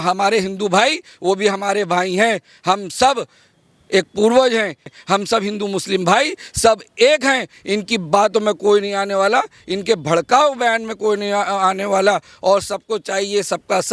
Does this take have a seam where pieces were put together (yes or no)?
yes